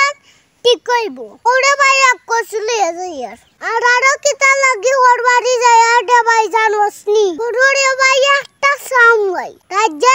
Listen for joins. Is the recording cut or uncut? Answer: cut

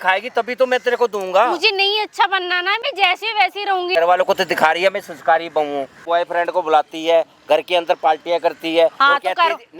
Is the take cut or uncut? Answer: cut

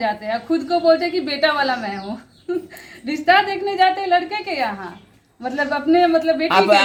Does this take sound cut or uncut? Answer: uncut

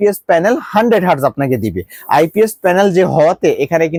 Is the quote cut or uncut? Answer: uncut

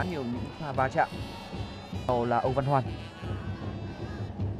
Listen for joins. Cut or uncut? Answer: cut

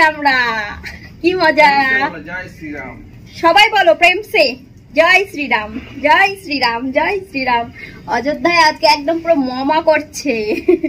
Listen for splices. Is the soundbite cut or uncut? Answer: uncut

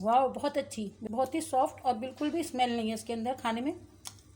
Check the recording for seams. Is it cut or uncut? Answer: cut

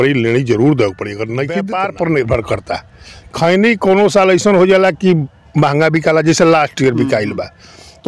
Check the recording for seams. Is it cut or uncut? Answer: cut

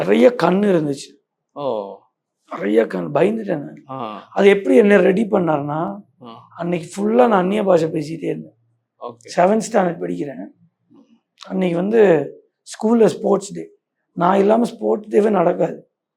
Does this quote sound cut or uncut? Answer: uncut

